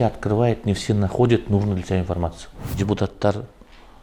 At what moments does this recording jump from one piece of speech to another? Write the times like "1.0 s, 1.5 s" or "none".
2.6 s